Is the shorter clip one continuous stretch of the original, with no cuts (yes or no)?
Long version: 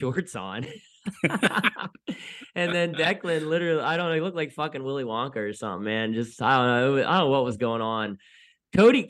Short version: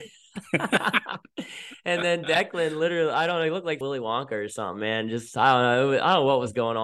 no